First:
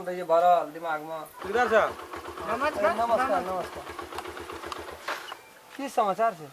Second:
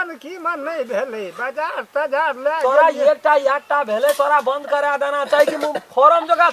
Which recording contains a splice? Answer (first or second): first